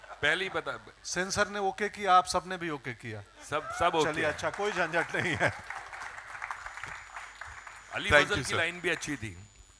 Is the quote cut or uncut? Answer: uncut